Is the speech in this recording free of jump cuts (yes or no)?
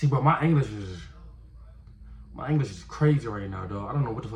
yes